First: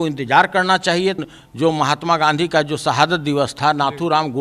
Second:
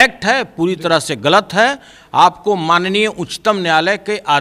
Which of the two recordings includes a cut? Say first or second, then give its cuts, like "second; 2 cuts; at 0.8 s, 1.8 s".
first; 1 cut; at 1.2 s